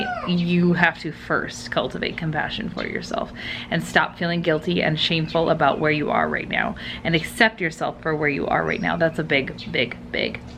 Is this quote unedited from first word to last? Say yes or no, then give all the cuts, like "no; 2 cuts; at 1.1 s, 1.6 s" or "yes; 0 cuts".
yes; 0 cuts